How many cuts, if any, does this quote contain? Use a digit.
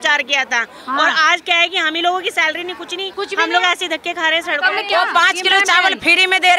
2